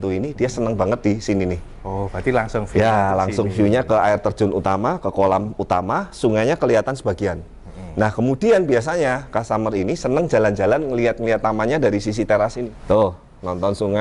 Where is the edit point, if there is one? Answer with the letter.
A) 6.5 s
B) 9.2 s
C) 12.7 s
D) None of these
C